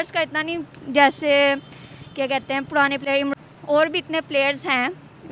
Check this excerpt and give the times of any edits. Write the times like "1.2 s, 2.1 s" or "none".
3.3 s